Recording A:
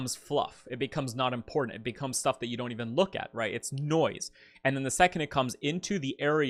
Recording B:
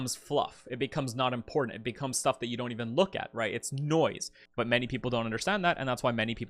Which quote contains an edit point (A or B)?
B